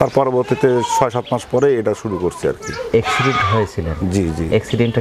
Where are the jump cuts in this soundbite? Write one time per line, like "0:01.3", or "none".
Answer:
none